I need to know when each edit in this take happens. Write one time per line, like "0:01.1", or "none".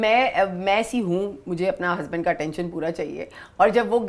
none